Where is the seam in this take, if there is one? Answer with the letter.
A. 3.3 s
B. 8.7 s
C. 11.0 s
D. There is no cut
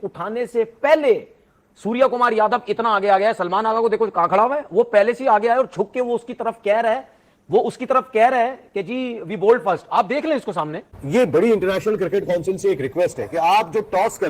C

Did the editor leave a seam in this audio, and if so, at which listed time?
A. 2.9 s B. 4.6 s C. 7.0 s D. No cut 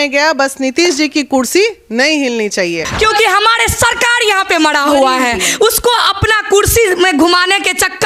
A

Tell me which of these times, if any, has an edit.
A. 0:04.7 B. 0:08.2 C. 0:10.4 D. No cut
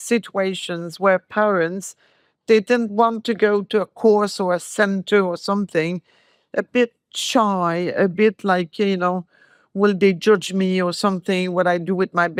D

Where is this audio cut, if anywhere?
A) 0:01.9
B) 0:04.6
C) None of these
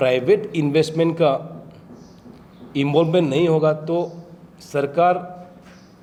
C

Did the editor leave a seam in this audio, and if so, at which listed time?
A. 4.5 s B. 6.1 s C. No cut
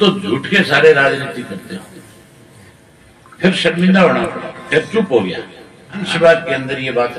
B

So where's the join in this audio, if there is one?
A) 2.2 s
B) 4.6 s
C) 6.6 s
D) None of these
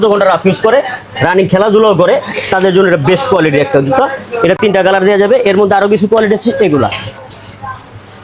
D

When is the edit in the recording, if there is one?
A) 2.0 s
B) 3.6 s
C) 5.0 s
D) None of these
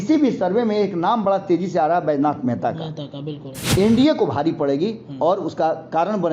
B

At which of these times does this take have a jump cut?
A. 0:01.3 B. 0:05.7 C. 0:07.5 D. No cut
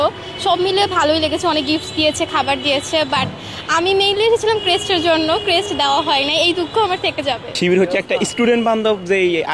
C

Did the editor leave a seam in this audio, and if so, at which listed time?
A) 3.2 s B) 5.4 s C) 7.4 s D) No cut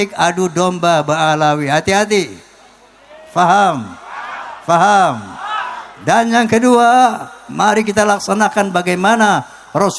D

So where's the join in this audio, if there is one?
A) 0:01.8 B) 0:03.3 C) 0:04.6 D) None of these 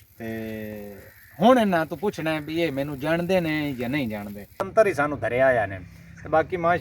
C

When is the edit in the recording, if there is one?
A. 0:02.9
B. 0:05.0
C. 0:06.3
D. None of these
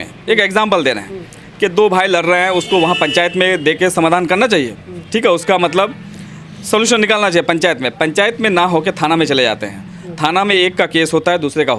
D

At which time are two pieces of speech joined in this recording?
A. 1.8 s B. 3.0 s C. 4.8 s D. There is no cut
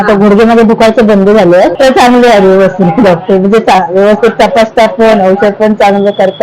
A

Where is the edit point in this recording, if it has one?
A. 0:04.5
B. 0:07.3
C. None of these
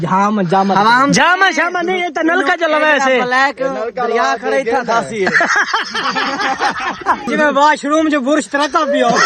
B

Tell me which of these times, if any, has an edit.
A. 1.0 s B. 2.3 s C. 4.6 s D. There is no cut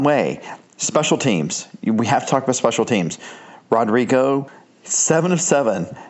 C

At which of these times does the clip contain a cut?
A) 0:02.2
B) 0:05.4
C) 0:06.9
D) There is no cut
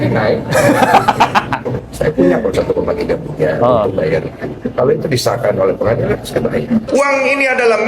C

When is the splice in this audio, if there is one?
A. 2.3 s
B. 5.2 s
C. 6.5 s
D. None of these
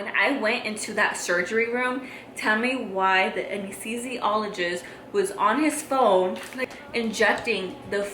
C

